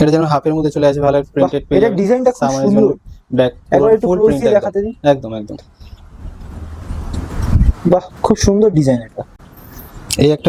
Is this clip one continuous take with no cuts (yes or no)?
yes